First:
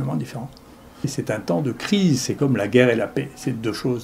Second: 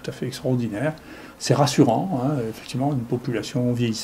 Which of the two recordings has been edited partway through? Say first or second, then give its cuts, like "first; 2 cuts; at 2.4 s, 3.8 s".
first; 1 cut; at 1.1 s